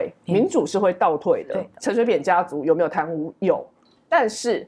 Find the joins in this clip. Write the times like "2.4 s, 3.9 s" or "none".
1.7 s